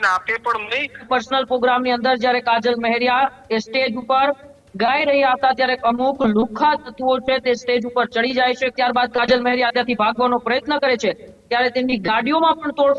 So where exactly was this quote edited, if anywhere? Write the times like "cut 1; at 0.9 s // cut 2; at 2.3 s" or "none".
cut 1; at 1.0 s // cut 2; at 8.7 s